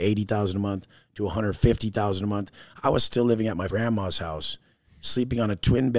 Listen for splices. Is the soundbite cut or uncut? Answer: cut